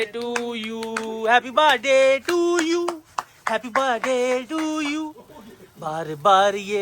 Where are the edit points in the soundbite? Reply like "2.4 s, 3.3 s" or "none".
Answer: none